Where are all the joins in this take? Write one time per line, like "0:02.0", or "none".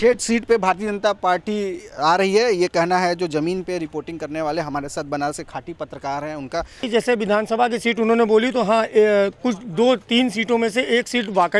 0:06.8